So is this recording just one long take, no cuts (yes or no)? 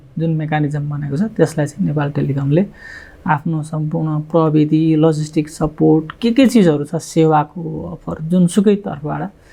yes